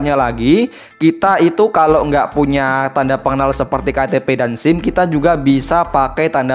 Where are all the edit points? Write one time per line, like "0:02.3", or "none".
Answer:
none